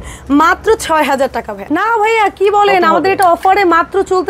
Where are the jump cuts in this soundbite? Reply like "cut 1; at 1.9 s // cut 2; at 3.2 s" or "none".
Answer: cut 1; at 1.5 s